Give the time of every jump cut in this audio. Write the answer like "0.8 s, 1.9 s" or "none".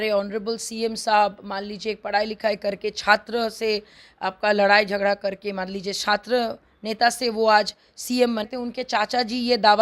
8.5 s